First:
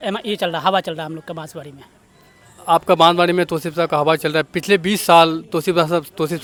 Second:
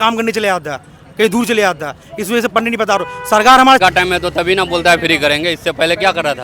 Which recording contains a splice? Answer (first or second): second